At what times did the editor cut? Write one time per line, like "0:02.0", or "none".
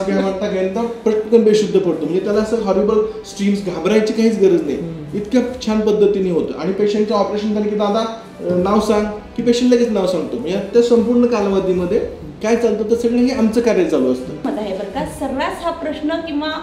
0:14.5